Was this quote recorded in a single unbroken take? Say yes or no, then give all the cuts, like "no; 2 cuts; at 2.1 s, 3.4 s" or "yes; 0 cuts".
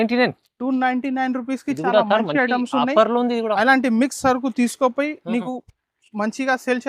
yes; 0 cuts